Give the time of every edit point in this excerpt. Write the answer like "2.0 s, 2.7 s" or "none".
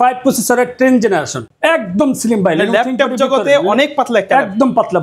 1.4 s